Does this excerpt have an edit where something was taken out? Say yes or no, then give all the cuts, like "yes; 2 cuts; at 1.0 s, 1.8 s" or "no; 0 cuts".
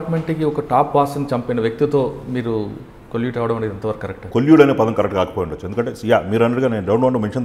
yes; 1 cut; at 4.2 s